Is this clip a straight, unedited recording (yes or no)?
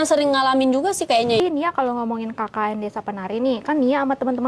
no